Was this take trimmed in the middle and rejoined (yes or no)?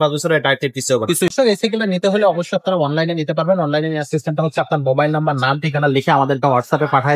yes